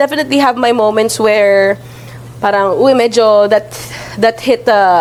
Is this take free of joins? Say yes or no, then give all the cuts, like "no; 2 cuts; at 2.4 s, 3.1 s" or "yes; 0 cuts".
yes; 0 cuts